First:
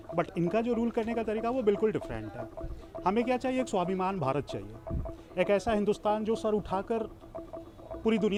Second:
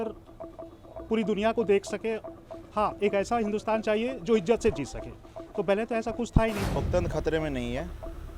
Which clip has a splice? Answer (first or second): second